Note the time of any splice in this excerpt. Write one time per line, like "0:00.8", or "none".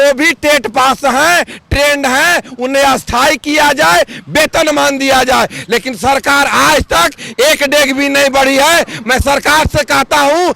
none